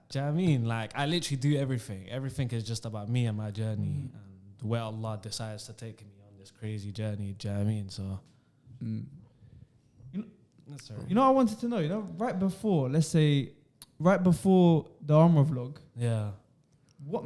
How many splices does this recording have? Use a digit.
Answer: 0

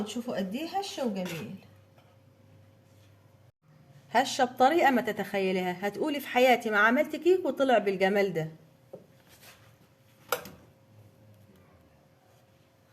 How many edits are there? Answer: 1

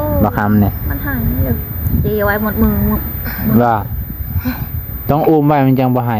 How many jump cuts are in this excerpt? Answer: 0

